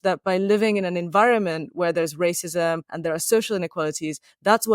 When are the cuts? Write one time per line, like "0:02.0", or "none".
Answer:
0:02.9